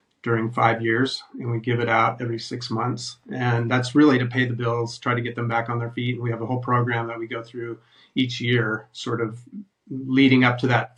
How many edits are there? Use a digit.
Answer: 0